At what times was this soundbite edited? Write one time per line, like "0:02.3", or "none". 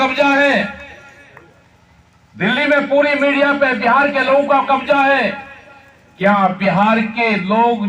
none